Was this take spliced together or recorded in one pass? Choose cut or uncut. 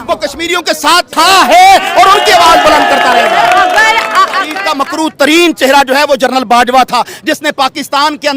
cut